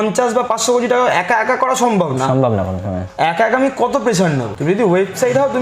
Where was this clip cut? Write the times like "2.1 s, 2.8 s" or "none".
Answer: 4.5 s